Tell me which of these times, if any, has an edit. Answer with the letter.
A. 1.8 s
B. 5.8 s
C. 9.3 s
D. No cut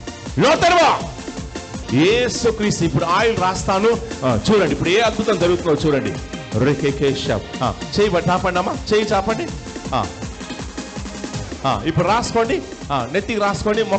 A